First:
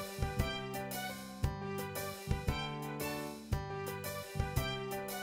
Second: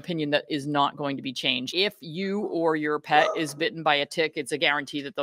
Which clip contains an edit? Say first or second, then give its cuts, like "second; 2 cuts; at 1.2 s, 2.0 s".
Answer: second; 1 cut; at 1.7 s